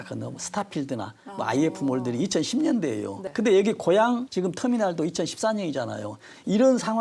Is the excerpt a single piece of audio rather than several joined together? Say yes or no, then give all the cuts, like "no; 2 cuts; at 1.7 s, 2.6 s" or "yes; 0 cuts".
no; 2 cuts; at 3.2 s, 4.3 s